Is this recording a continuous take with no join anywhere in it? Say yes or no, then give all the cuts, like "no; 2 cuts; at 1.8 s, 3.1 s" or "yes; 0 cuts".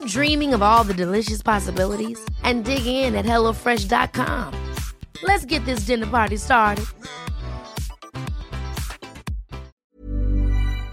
no; 1 cut; at 9.9 s